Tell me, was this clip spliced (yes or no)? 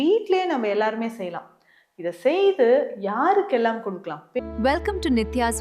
yes